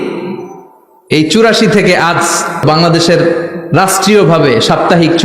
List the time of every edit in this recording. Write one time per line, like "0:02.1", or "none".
0:02.6